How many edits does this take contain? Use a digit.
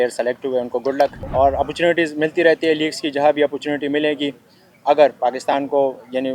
1